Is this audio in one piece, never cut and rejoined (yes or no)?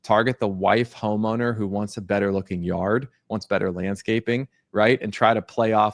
yes